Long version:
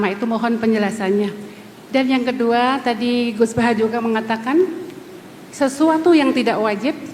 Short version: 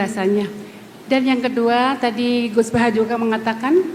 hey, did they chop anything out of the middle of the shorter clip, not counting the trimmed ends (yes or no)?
no